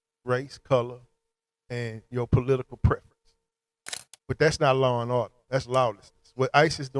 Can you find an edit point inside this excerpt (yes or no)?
no